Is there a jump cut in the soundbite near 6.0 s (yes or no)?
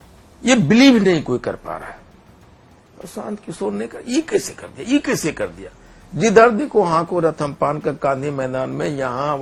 no